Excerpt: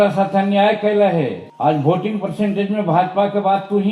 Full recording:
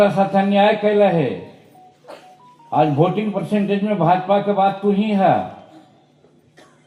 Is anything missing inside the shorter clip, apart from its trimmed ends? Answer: yes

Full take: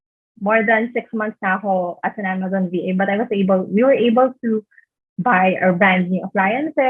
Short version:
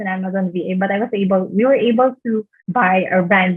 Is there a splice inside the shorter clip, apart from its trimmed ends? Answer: yes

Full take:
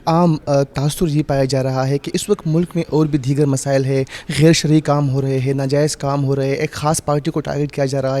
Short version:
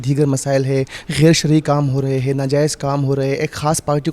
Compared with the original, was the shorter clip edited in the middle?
no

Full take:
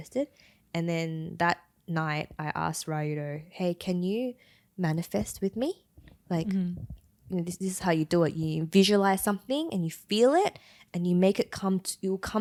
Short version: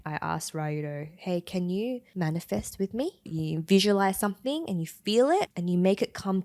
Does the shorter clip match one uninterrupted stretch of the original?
no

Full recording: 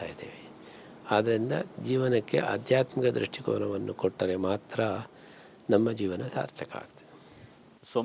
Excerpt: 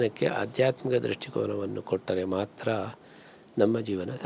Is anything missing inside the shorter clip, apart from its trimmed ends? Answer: no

